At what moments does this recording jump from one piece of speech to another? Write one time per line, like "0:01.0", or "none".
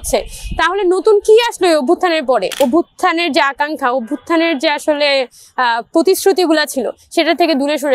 0:02.6